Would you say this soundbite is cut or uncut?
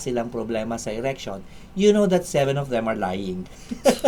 uncut